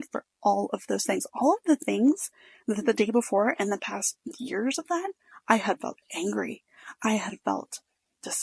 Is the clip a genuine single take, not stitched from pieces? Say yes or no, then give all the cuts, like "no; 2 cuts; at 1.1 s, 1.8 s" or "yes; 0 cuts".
yes; 0 cuts